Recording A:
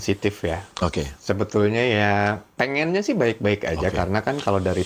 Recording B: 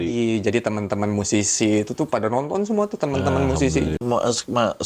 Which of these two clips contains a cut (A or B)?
B